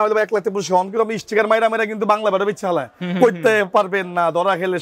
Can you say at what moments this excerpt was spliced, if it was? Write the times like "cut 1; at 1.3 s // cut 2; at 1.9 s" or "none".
none